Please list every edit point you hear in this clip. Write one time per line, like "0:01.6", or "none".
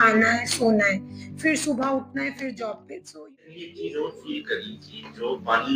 0:02.9